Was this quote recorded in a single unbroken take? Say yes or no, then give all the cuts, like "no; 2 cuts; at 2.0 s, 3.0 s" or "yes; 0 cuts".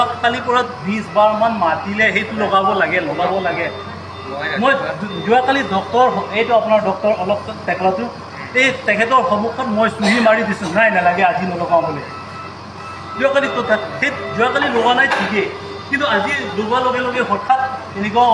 yes; 0 cuts